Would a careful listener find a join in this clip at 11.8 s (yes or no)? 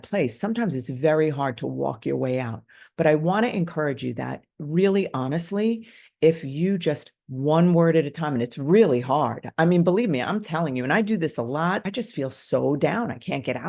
yes